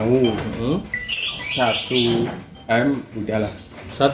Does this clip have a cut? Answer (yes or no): no